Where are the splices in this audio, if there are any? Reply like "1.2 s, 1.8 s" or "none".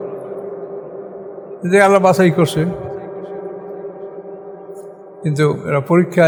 none